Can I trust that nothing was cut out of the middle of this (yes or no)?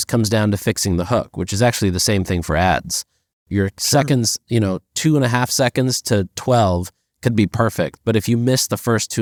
yes